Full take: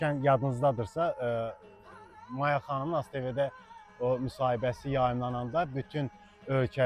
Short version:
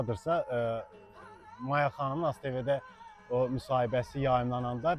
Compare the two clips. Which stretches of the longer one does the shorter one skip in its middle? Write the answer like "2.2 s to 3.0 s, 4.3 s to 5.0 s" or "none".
none